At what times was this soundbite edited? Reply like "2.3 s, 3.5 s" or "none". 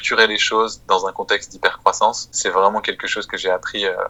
none